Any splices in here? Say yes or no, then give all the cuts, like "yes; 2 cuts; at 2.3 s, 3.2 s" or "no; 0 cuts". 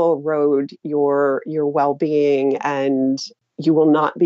yes; 1 cut; at 3.3 s